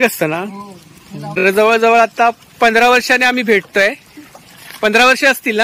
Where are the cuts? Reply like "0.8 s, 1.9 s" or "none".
1.4 s